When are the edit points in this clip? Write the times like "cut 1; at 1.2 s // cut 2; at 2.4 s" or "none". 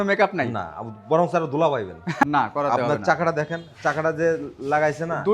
cut 1; at 2.2 s